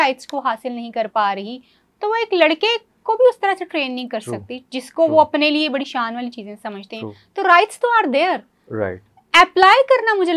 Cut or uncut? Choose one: uncut